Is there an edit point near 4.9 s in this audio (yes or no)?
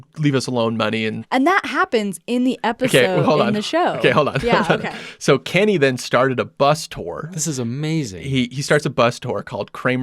no